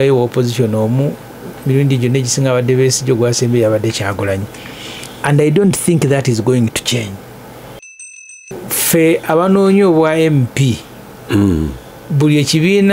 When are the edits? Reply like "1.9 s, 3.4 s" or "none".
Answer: 8.0 s